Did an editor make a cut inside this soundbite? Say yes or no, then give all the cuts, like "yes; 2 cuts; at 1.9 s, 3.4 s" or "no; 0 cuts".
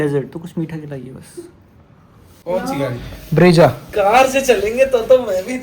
yes; 1 cut; at 2.3 s